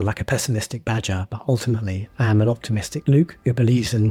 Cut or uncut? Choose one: uncut